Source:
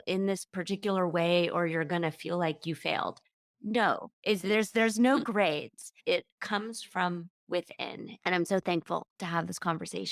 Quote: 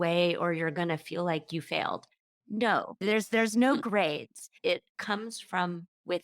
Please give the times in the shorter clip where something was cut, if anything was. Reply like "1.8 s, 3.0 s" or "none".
3.0 s